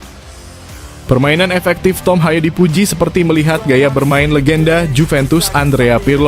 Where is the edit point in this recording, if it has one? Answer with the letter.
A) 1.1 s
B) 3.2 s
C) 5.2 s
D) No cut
A